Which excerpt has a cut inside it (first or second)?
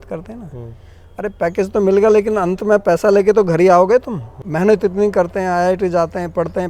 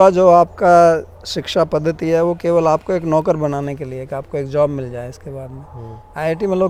first